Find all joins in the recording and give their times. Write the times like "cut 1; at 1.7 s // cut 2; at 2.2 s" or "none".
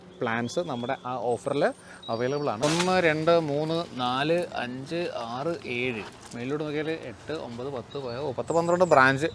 cut 1; at 2.6 s